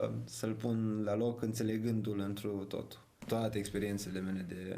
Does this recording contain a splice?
yes; 1 cut; at 3.1 s

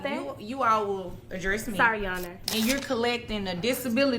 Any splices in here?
yes; 1 cut; at 2.4 s

